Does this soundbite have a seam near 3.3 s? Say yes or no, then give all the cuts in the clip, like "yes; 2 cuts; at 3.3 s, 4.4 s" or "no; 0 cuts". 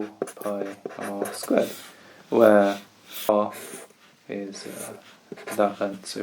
yes; 1 cut; at 3.3 s